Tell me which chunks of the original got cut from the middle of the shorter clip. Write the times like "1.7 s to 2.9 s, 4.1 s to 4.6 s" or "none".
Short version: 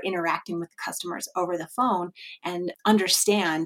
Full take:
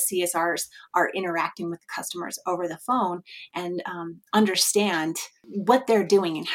3.9 s to 4.2 s

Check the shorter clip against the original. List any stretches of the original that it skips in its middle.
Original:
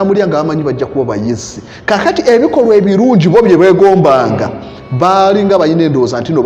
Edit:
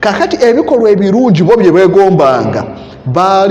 none

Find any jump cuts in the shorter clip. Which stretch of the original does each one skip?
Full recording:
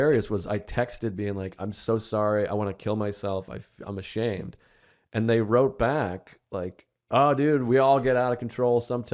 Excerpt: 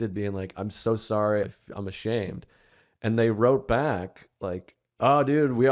2.5 s to 3.6 s

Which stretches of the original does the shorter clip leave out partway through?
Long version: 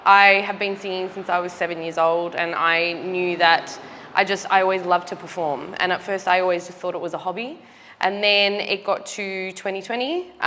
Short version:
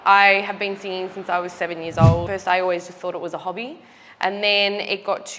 2.3 s to 6.1 s

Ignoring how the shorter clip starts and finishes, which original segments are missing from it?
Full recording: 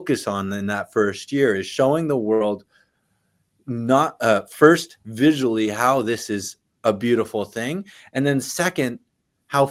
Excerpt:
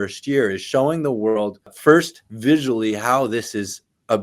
2.8 s to 4.5 s

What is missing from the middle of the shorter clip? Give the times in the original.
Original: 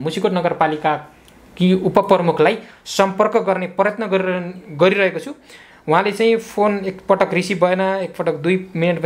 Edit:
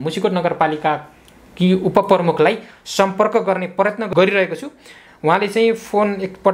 4.0 s to 4.7 s

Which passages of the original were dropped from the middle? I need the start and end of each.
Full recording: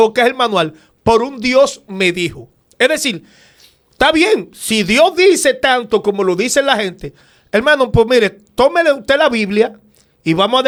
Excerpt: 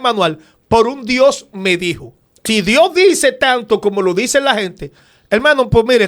2.7 s to 4.5 s

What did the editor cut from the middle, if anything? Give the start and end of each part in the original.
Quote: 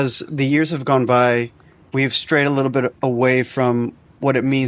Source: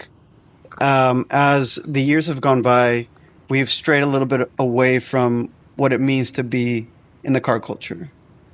none

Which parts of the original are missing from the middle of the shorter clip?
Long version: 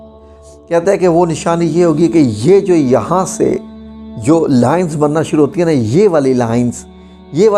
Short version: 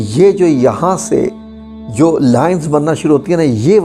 none

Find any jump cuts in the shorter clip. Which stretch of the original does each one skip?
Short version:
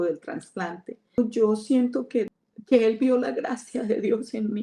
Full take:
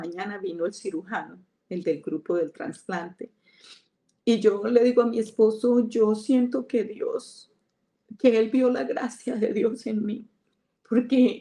3.5 s to 5.8 s, 7.0 s to 7.9 s

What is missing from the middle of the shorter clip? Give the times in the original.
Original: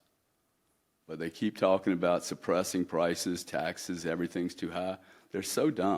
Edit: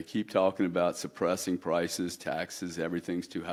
none

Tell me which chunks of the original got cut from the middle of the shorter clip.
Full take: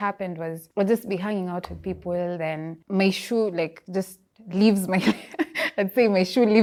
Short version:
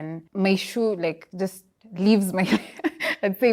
none

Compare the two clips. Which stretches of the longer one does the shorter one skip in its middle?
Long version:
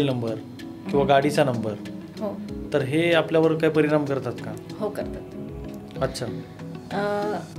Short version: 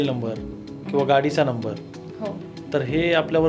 none

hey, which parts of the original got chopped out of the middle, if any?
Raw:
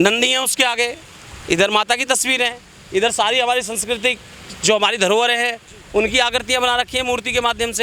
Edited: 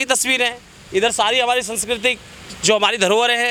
none

